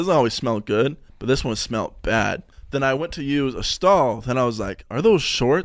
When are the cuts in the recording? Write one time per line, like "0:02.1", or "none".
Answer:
0:01.1
0:02.5